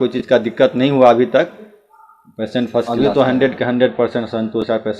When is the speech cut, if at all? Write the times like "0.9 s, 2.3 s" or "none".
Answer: 2.9 s